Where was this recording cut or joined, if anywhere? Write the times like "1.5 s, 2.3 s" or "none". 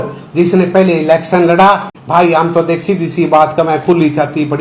1.9 s